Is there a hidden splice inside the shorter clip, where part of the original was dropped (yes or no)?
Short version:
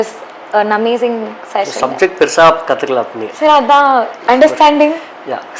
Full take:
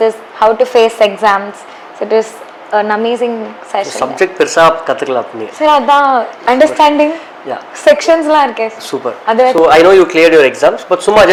no